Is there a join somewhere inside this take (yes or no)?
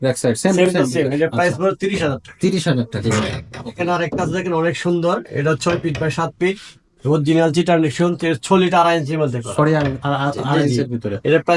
no